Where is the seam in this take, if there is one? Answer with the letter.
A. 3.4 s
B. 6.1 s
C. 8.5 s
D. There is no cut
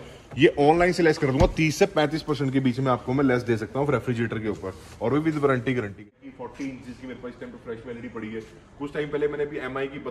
B